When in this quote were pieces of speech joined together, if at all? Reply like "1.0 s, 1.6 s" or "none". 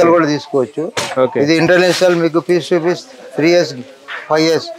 none